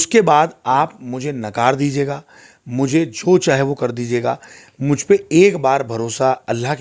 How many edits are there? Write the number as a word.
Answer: zero